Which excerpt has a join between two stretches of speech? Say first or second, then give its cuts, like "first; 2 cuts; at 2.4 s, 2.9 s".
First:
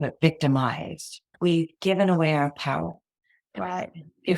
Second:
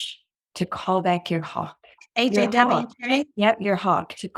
first; 1 cut; at 1.3 s